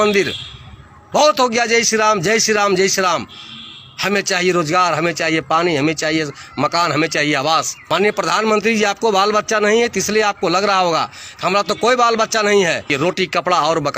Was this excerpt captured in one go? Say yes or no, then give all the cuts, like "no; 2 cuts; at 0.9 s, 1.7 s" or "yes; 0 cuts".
no; 2 cuts; at 7.7 s, 12.9 s